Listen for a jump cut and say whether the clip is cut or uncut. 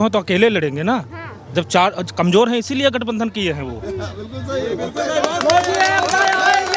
uncut